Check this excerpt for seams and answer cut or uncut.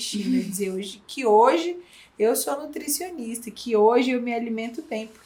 uncut